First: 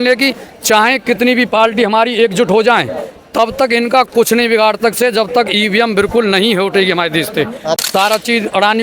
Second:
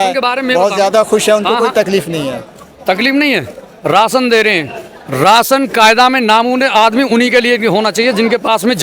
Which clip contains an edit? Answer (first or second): first